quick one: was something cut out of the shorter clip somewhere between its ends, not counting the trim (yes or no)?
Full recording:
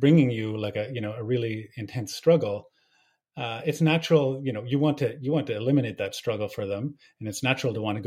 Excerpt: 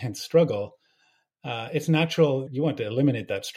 yes